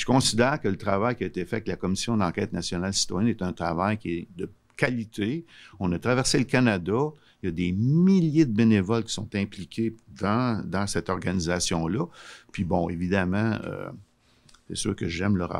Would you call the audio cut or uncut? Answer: uncut